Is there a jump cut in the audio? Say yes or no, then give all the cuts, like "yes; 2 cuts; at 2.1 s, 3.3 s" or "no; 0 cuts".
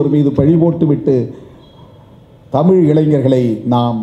no; 0 cuts